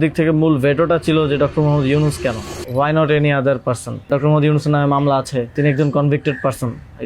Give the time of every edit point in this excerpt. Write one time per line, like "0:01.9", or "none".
0:02.5
0:04.1
0:05.5